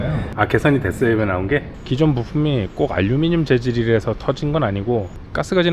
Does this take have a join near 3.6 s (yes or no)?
no